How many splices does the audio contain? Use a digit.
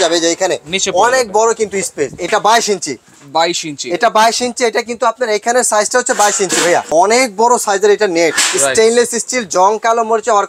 2